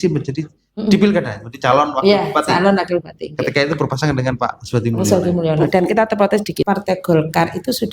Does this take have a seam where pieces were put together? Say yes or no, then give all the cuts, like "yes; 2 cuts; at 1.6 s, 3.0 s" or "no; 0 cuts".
yes; 1 cut; at 6.6 s